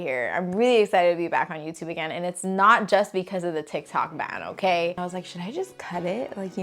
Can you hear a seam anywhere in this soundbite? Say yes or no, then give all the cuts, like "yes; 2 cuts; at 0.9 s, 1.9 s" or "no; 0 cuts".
yes; 1 cut; at 5.0 s